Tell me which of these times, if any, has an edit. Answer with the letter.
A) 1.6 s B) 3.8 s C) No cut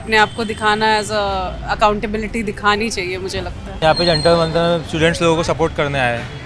B